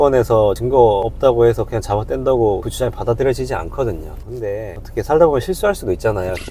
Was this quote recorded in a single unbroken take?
no; 1 cut; at 4.2 s

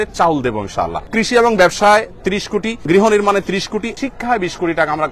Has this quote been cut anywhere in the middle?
yes; 3 cuts; at 1.1 s, 2.8 s, 3.9 s

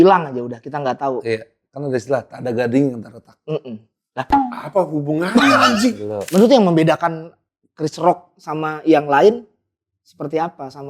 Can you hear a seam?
yes; 1 cut; at 6.1 s

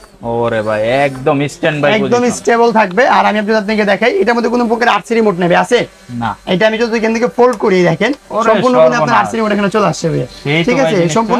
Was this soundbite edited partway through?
no; 0 cuts

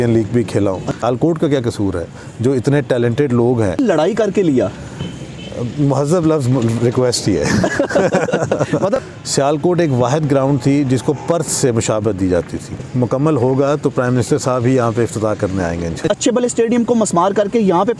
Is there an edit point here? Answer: yes; 5 cuts; at 1.0 s, 3.8 s, 9.1 s, 12.9 s, 16.0 s

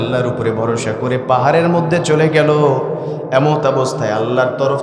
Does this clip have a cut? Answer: no; 0 cuts

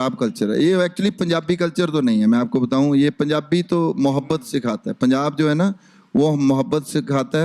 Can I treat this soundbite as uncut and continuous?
yes; 0 cuts

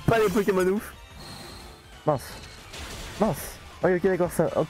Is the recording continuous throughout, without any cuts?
no; 1 cut; at 0.9 s

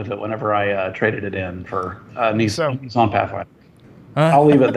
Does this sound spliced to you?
yes; 2 cuts; at 2.0 s, 3.8 s

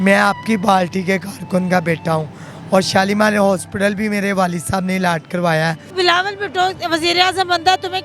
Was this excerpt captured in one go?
no; 1 cut; at 5.8 s

